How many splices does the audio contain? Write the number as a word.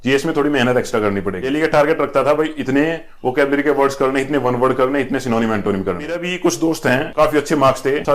two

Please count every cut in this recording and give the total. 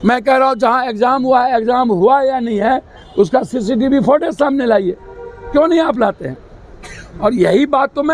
zero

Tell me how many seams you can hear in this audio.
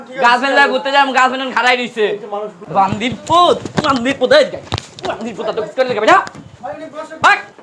one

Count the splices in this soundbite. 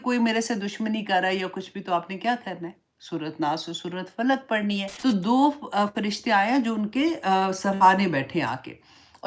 one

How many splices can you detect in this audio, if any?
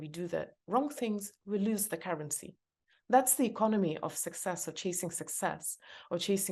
zero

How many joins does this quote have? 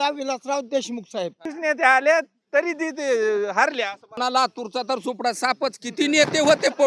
two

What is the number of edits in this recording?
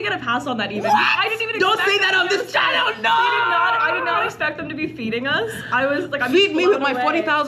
zero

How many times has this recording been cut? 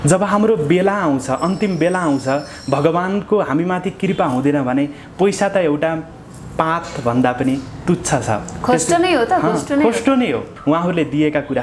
one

